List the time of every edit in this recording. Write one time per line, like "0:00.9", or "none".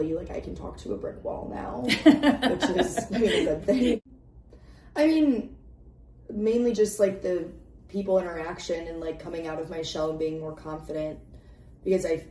0:04.0